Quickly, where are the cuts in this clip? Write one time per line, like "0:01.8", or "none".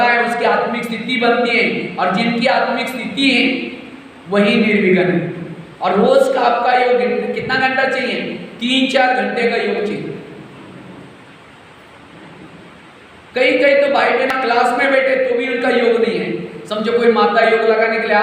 0:14.3